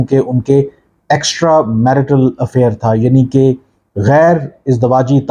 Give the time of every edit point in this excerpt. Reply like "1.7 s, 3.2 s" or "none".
none